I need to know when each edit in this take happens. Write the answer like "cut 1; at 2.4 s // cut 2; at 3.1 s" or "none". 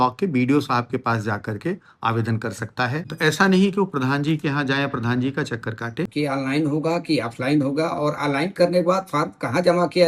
cut 1; at 3.0 s // cut 2; at 6.1 s